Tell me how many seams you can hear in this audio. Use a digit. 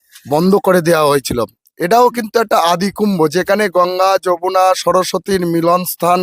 0